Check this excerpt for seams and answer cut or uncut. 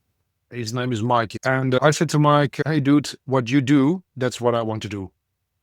cut